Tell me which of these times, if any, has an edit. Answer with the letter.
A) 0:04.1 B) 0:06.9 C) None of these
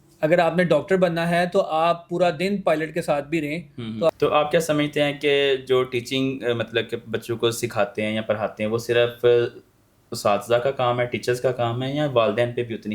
A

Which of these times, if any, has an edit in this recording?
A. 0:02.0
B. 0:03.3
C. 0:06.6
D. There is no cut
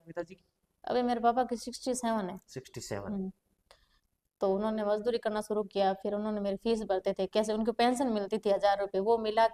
D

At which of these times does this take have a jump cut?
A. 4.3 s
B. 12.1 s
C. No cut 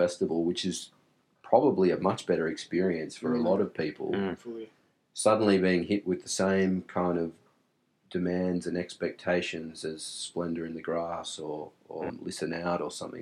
B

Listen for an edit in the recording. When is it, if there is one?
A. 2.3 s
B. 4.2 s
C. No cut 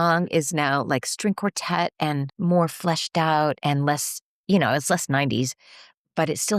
A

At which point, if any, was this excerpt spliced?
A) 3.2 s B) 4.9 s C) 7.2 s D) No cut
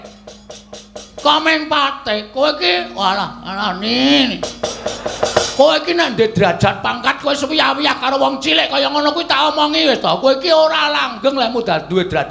D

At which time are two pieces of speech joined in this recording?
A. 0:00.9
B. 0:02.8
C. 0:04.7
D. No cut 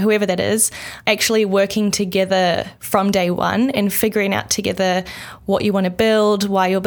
A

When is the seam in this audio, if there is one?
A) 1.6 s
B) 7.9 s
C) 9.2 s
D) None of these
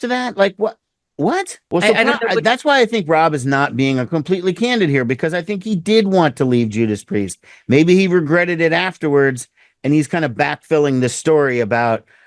A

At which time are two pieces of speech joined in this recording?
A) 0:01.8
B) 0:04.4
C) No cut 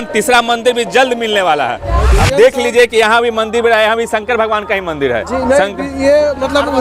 A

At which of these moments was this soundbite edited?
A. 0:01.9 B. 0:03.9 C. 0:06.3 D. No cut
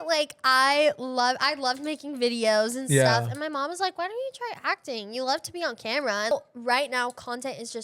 C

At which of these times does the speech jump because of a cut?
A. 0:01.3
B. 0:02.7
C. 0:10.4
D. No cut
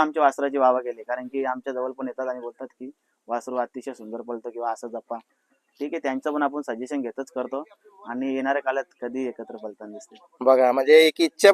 D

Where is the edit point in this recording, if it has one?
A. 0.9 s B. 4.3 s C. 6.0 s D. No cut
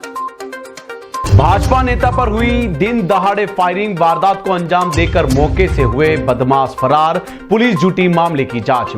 A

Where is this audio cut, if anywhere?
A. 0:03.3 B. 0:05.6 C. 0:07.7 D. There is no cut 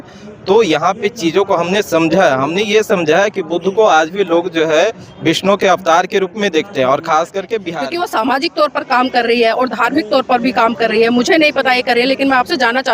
C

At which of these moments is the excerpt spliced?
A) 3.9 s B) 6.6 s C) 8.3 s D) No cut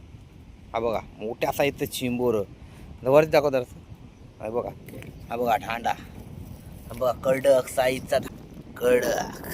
C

